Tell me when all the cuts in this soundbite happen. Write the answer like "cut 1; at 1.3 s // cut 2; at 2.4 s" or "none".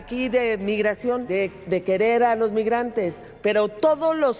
cut 1; at 1.3 s